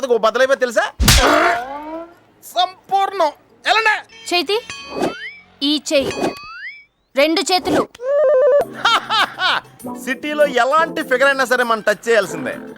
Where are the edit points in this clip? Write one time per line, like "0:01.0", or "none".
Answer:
0:04.1
0:08.6